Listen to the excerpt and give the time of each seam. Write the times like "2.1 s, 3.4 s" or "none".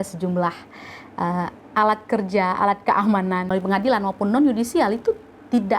3.5 s